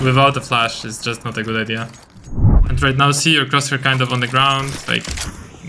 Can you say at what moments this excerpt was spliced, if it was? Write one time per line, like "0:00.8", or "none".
0:02.7